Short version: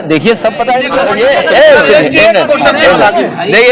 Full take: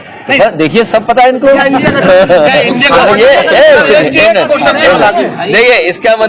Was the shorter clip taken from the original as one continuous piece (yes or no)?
no